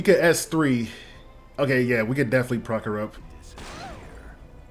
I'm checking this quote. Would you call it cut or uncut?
cut